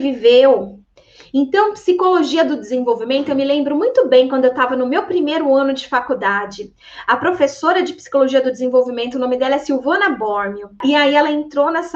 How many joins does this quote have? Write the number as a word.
one